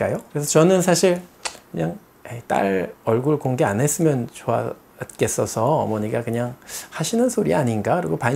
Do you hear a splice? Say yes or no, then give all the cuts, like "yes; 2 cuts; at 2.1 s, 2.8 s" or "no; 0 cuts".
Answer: no; 0 cuts